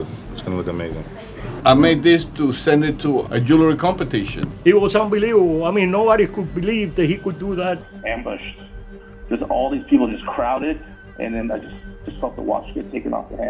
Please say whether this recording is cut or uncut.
cut